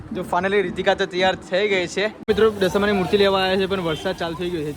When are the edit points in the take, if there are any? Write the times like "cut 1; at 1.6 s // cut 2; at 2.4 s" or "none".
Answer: cut 1; at 2.2 s

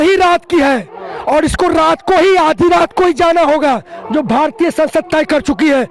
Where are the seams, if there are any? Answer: none

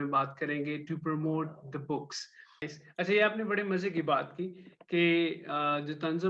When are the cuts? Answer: cut 1; at 2.6 s

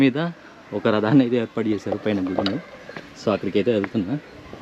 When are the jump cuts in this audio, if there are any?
none

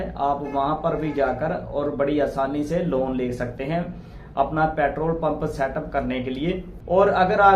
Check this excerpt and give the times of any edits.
cut 1; at 6.7 s

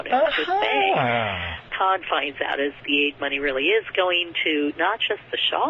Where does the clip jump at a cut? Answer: cut 1; at 1.7 s // cut 2; at 2.8 s

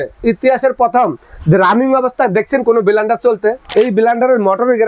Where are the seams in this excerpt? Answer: cut 1; at 3.6 s

